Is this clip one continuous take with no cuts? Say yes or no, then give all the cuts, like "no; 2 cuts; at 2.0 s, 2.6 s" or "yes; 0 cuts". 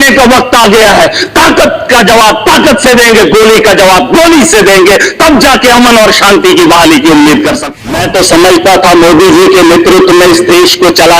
no; 1 cut; at 7.6 s